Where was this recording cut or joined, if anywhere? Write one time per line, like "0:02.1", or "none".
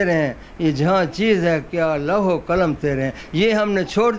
none